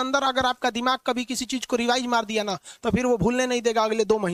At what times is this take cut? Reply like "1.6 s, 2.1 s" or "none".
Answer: none

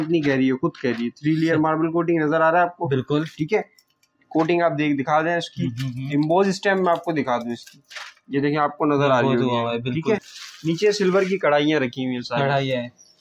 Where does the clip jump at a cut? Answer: 10.3 s

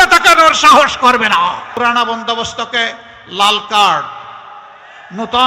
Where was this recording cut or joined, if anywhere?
1.7 s

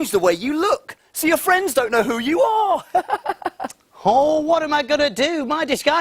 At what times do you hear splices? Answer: none

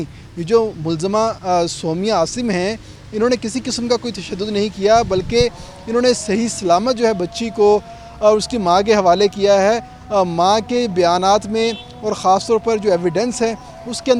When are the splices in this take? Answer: none

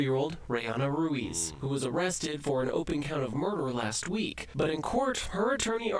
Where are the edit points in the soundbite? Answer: 1.3 s

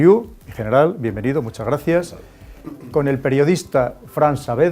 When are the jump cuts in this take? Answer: 1.8 s

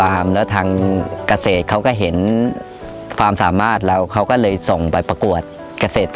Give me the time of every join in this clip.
5.0 s

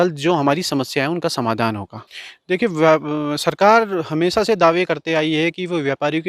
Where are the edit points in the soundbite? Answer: 1.9 s

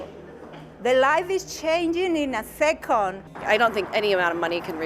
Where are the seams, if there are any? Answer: 3.3 s

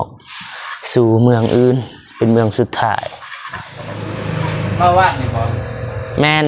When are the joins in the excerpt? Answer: 3.9 s

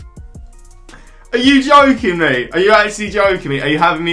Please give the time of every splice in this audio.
0.9 s

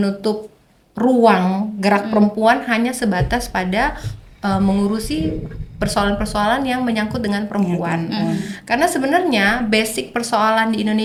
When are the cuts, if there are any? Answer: none

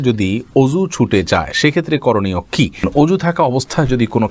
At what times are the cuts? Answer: 2.9 s

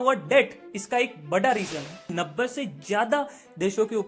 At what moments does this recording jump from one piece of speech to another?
2.1 s

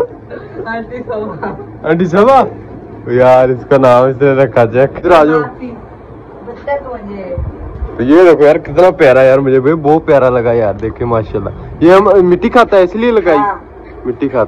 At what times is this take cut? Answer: 5.0 s

